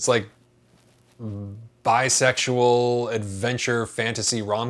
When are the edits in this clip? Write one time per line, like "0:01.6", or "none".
none